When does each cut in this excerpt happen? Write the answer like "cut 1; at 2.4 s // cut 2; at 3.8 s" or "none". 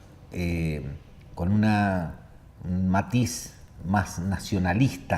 cut 1; at 1.7 s